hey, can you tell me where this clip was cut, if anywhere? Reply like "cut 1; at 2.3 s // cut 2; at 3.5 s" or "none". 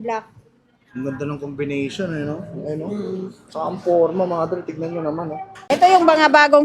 cut 1; at 5.7 s